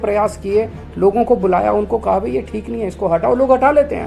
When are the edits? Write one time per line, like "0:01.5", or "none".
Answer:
none